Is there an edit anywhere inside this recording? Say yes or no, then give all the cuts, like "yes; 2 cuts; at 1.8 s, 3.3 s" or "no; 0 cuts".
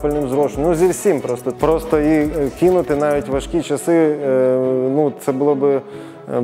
yes; 1 cut; at 1.5 s